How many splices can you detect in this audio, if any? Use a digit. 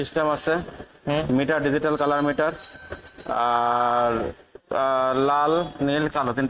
1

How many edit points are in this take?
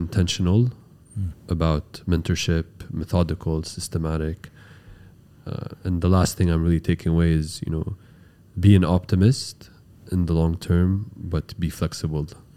0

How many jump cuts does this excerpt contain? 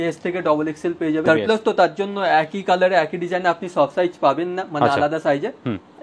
1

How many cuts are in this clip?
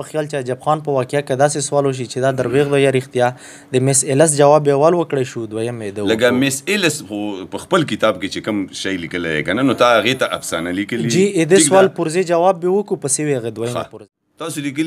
1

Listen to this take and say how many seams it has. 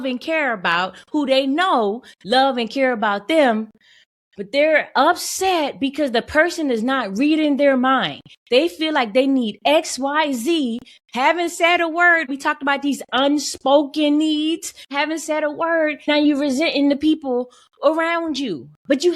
3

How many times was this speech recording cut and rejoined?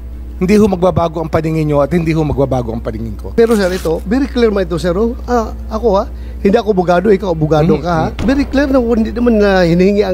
2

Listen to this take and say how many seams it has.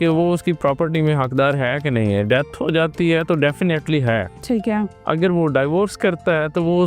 0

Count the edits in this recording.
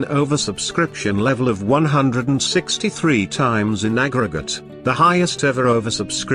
0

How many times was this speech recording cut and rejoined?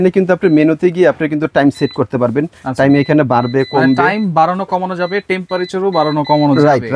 0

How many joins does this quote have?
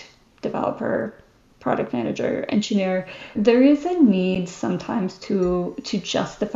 1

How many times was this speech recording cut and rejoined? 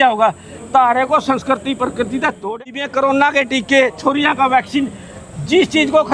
1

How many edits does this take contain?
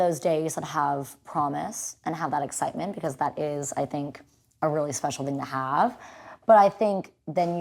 0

